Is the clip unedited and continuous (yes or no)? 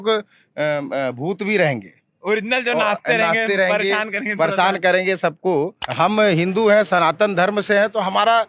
no